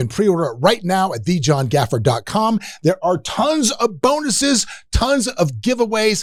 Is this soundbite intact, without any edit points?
yes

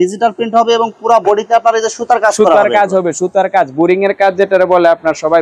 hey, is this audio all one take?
yes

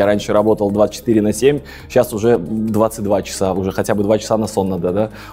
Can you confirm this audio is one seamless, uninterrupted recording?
yes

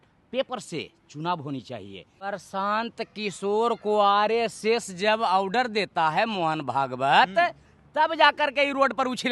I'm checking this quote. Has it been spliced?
yes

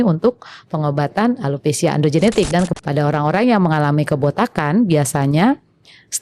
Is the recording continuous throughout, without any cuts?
no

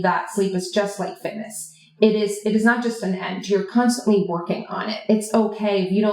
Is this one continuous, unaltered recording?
yes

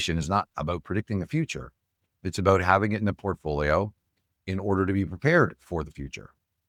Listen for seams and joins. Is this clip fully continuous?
yes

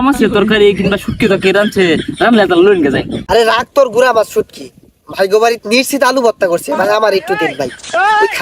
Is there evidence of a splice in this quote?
no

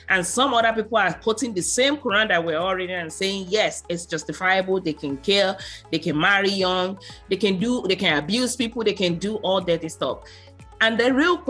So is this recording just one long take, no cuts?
yes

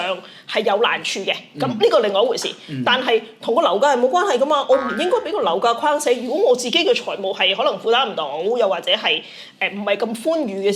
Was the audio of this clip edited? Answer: no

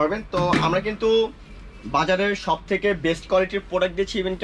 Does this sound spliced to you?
no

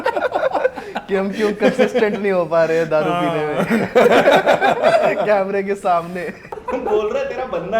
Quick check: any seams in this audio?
yes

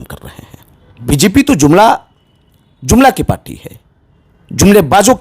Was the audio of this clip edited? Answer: yes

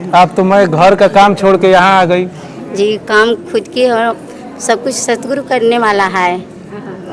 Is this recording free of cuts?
yes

